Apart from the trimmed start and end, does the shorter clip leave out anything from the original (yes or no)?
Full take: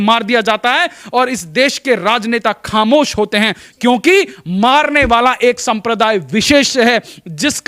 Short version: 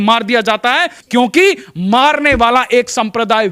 yes